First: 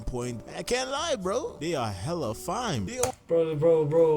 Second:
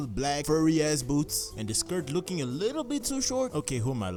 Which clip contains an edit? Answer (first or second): first